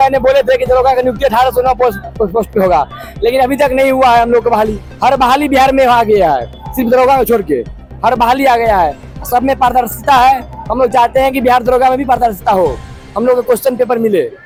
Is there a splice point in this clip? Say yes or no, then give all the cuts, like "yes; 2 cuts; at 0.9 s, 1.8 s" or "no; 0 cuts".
no; 0 cuts